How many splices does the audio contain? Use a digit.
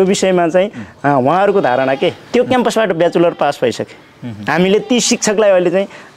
1